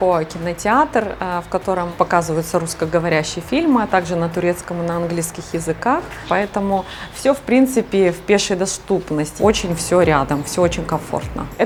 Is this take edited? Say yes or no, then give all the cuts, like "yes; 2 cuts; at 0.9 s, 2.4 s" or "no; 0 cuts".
no; 0 cuts